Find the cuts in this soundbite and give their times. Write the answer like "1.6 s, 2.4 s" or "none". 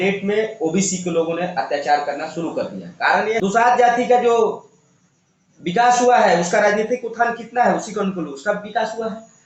3.4 s